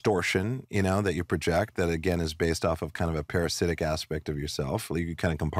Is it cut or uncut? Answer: uncut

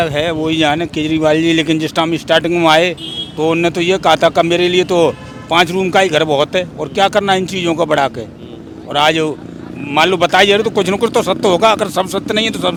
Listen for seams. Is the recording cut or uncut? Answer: uncut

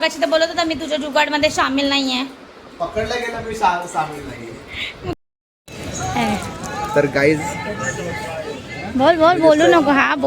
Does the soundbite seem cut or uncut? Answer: cut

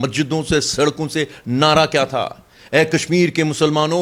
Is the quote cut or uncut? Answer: uncut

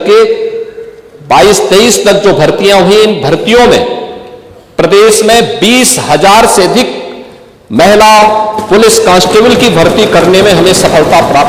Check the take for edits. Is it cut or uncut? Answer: uncut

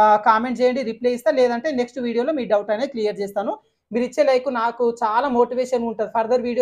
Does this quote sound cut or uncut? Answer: cut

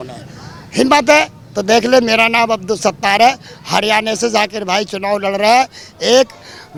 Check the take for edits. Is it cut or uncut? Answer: uncut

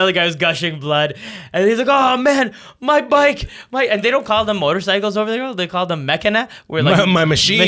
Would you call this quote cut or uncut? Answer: uncut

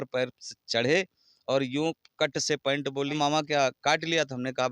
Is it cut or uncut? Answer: cut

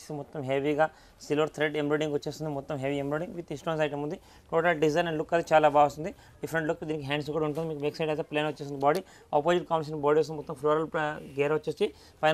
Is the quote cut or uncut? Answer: uncut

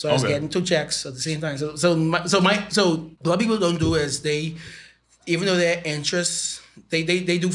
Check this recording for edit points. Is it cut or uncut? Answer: cut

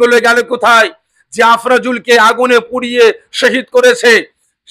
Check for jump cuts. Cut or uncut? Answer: uncut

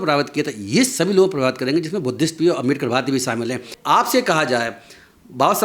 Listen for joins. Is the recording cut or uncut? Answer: cut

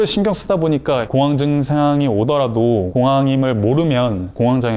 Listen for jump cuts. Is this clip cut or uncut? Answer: cut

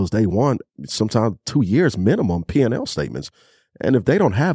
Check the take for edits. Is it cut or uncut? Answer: uncut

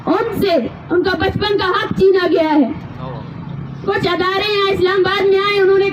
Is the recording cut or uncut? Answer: uncut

